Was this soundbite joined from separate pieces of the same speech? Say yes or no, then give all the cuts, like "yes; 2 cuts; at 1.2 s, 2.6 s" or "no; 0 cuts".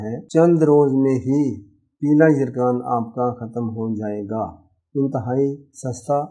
no; 0 cuts